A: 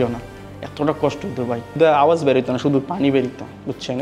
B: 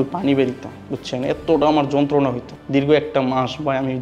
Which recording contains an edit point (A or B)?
A